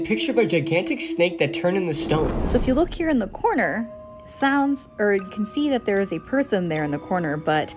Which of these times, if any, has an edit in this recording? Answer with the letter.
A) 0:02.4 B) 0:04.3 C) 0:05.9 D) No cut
A